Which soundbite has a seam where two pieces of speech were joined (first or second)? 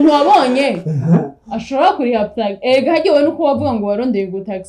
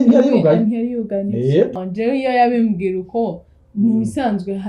second